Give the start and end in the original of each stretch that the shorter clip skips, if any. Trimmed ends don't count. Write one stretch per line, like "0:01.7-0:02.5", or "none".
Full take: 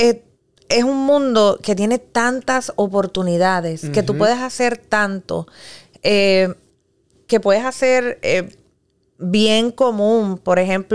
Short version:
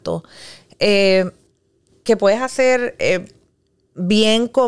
none